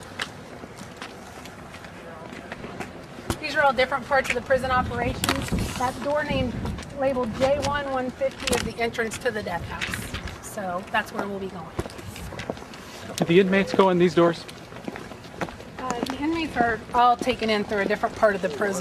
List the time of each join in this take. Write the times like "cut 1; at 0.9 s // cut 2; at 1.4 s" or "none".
cut 1; at 16.0 s